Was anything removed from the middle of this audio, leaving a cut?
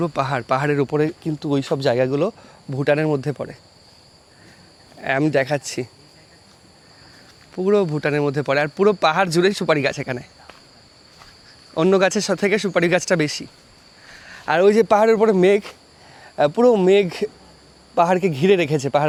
no; 0 cuts

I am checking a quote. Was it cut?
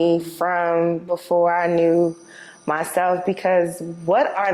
no; 0 cuts

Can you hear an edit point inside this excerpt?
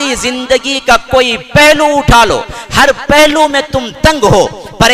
no; 0 cuts

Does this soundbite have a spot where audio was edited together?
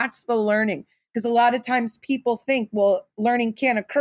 no; 0 cuts

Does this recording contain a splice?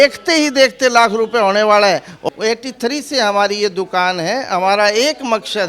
yes; 1 cut; at 2.2 s

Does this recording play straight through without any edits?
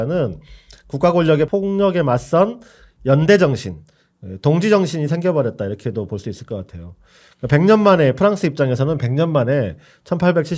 no; 1 cut; at 1.5 s

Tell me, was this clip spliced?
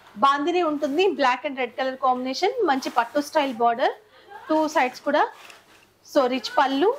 no; 0 cuts

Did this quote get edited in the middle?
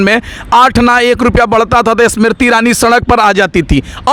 no; 0 cuts

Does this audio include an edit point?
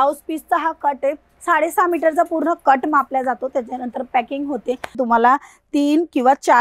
yes; 2 cuts; at 1.3 s, 5.0 s

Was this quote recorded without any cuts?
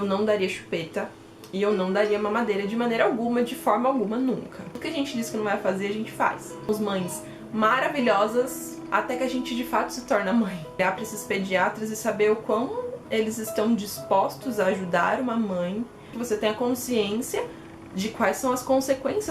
no; 4 cuts; at 4.8 s, 6.7 s, 10.8 s, 16.1 s

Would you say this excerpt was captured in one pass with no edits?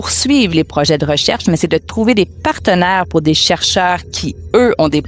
yes; 0 cuts

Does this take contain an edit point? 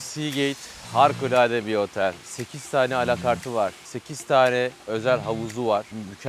no; 0 cuts

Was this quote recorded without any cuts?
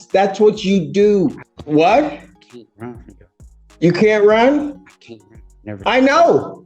no; 1 cut; at 1.5 s

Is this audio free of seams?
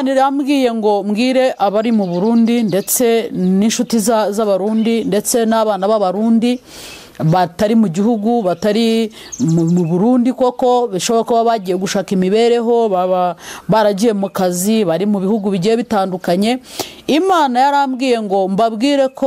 yes; 0 cuts

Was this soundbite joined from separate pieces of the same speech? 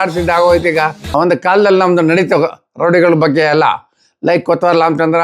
yes; 1 cut; at 1.0 s

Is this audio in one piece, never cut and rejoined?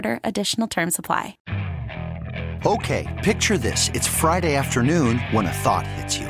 no; 1 cut; at 1.4 s

